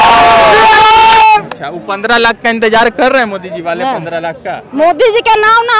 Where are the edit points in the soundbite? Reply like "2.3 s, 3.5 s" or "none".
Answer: none

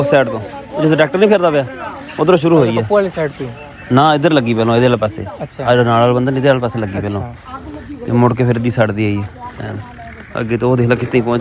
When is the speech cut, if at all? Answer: none

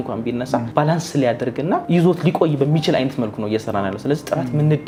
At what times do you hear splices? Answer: none

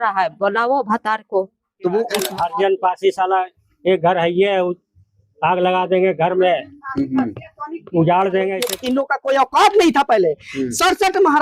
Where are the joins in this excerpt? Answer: 2.2 s, 8.7 s

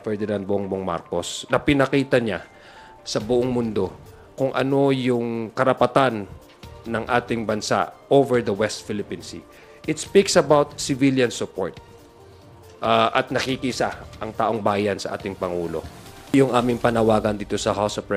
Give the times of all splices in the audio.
16.3 s

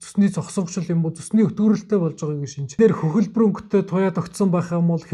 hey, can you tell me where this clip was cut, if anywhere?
2.8 s

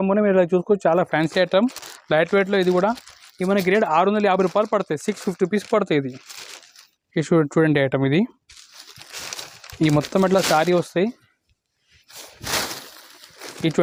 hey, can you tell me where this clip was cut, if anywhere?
none

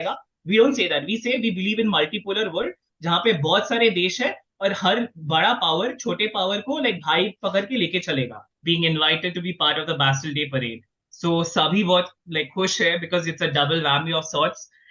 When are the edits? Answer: 8.5 s

